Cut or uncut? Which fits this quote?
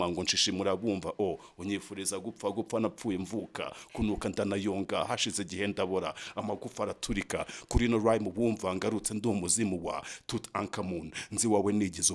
uncut